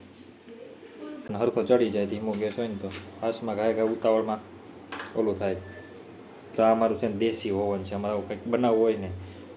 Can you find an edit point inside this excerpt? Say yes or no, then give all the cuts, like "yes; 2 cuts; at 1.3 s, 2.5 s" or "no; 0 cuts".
yes; 1 cut; at 1.3 s